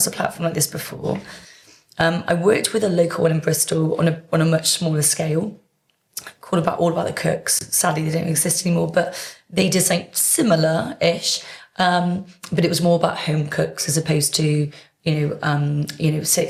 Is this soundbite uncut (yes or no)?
yes